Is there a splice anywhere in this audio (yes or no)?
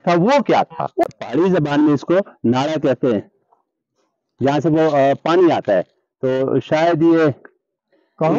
yes